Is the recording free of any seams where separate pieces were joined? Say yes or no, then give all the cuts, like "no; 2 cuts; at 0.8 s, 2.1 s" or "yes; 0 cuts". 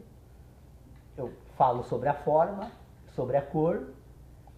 no; 1 cut; at 3.5 s